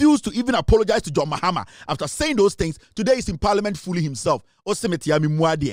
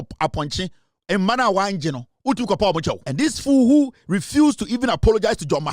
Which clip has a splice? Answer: second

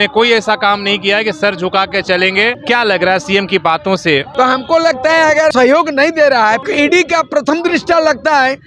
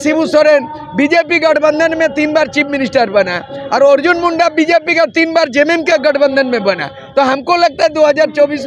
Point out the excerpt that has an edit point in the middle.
first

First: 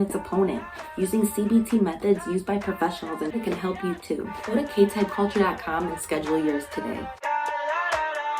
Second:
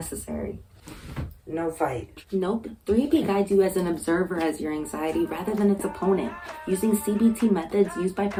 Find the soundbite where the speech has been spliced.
first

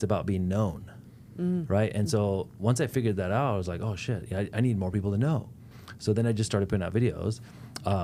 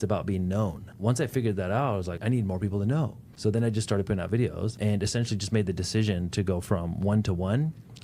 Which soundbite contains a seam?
second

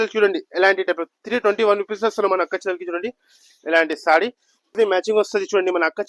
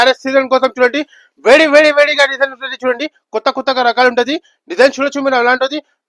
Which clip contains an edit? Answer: first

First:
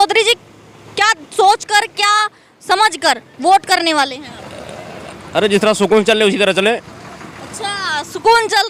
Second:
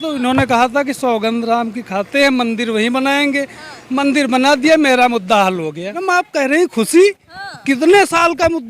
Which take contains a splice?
second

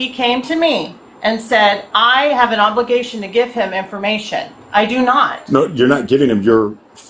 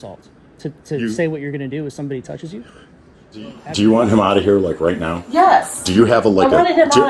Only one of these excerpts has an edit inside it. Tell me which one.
second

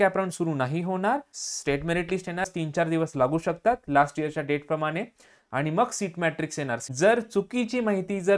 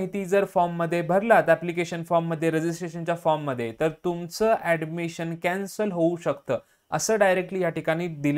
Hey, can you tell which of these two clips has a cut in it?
first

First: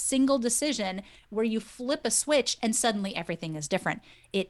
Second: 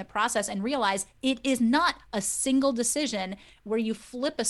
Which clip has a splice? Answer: second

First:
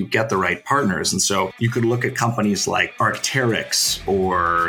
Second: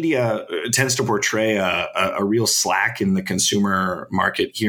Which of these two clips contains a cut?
first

